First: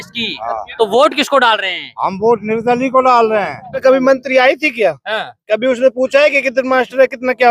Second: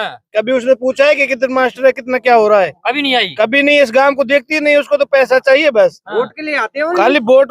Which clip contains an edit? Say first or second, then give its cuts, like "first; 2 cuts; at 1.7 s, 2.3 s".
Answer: first; 1 cut; at 3.8 s